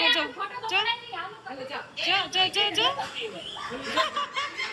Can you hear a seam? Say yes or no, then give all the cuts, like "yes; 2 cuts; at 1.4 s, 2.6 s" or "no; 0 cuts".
no; 0 cuts